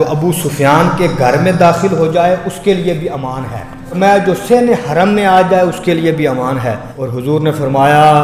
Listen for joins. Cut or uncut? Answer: cut